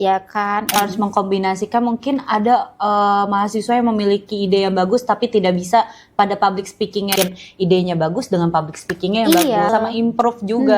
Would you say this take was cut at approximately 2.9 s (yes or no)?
no